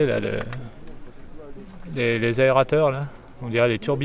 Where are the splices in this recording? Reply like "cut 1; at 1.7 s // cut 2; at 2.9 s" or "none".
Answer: none